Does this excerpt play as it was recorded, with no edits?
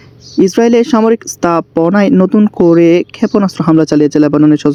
yes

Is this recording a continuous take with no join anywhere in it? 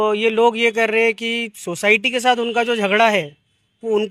yes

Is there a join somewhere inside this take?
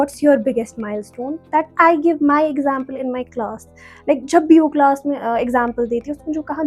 no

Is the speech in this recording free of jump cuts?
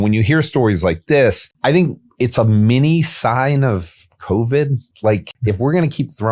no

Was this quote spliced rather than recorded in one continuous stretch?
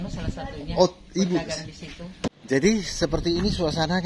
yes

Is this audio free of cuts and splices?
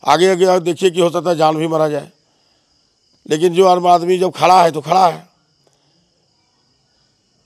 yes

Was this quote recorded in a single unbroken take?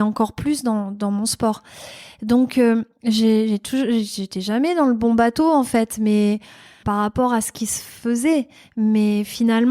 no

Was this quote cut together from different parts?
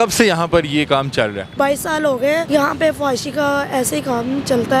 yes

